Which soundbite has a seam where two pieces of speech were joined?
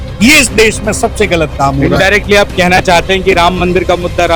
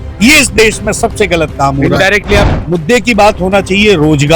second; 1 cut; at 2.5 s

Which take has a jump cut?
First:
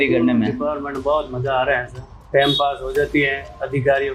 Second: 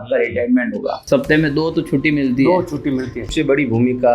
second; 2 cuts; at 1.0 s, 3.2 s

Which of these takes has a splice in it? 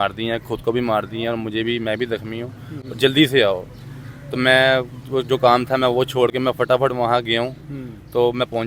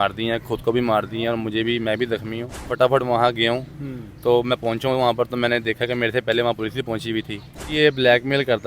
second; 2 cuts; at 2.7 s, 7.7 s

